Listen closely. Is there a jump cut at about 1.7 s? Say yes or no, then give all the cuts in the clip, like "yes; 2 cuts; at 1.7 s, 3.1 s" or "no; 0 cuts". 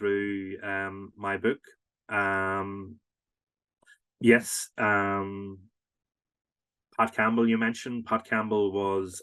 no; 0 cuts